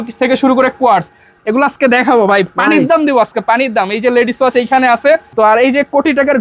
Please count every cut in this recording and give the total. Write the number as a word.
two